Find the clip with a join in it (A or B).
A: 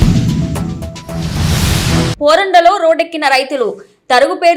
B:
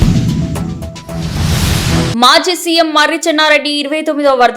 B